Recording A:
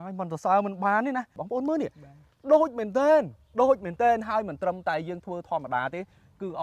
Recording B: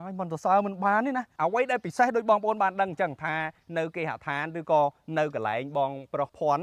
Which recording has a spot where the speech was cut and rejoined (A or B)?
A